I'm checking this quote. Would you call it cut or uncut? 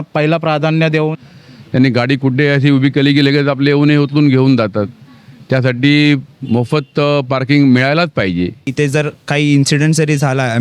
cut